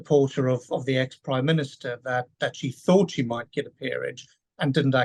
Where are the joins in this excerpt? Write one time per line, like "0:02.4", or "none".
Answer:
none